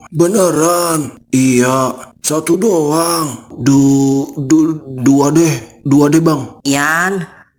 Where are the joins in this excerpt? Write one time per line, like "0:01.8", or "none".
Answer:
none